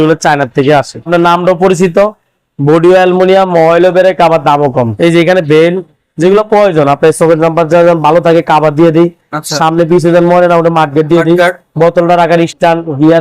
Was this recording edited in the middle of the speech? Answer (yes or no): yes